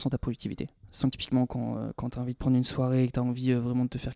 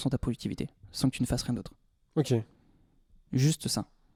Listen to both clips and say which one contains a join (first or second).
first